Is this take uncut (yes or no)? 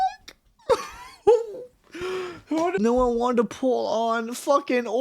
no